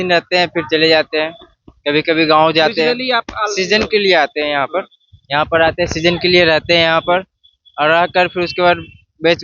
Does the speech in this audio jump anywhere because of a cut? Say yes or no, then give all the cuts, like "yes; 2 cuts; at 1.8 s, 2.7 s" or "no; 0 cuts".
no; 0 cuts